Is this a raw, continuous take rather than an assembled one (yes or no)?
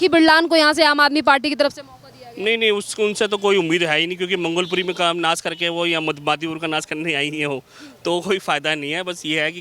yes